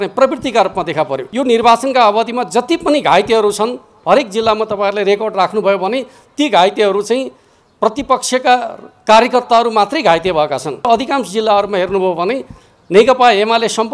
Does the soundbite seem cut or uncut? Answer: cut